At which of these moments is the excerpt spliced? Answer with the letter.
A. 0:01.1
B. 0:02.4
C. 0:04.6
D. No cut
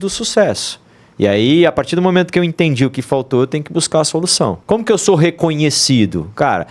C